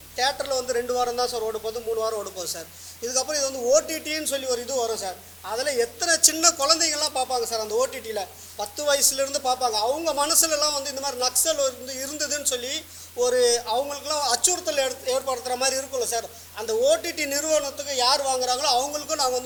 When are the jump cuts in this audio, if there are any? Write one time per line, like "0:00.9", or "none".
none